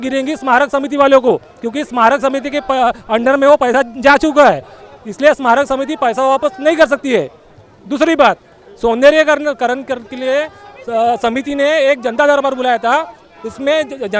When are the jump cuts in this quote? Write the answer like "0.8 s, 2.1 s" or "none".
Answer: none